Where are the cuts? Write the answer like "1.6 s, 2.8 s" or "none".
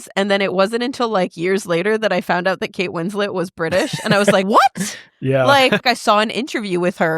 4.4 s, 5.8 s